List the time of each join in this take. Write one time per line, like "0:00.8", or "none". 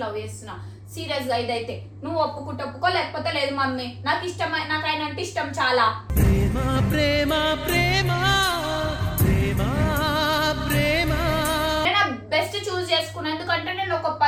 none